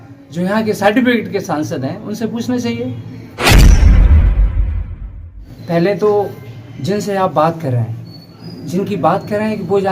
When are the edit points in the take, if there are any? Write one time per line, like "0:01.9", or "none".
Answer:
0:03.3
0:05.5